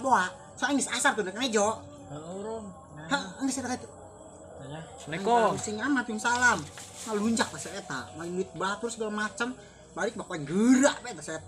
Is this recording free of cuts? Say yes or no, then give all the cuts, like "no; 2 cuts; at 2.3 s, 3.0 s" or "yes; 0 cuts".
yes; 0 cuts